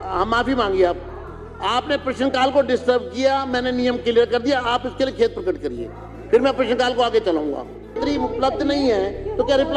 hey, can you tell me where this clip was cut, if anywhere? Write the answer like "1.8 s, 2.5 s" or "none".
8.0 s